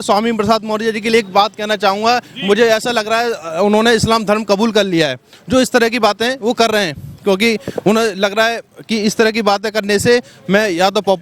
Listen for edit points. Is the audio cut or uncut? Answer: uncut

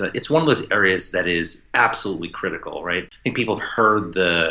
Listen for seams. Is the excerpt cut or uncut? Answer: cut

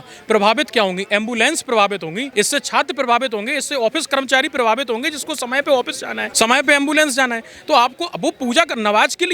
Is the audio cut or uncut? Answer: cut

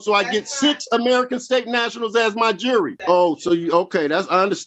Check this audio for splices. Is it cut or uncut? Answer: cut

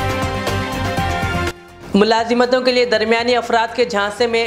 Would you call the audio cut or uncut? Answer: cut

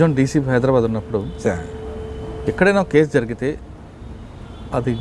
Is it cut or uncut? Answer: uncut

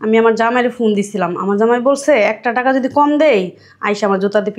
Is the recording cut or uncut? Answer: uncut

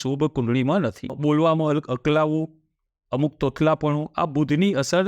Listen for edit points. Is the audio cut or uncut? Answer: cut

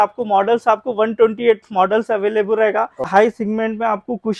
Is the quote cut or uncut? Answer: cut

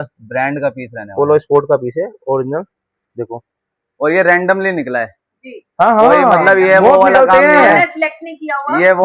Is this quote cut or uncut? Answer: uncut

